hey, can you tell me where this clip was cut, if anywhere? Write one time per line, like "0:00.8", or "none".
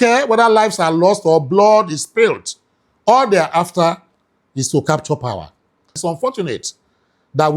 0:05.9